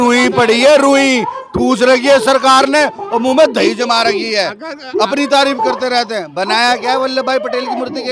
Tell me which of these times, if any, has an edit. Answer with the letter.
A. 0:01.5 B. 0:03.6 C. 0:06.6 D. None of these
D